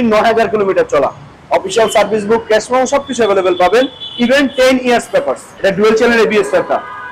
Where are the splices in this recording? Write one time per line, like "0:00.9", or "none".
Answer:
0:05.4